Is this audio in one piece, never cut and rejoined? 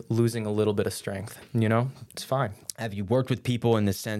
no; 1 cut; at 2.6 s

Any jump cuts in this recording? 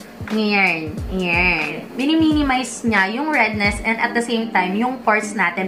yes; 1 cut; at 1.8 s

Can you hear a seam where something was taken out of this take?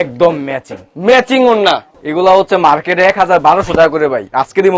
yes; 1 cut; at 2.0 s

